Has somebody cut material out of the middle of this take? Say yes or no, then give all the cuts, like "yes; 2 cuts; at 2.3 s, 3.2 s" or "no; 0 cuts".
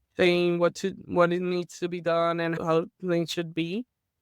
yes; 1 cut; at 2.6 s